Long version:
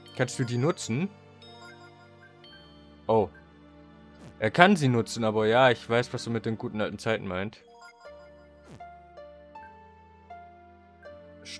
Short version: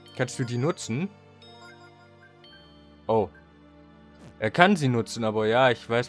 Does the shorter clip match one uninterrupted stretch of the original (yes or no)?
yes